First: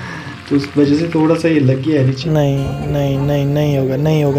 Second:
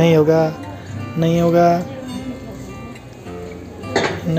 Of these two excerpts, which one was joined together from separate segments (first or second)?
first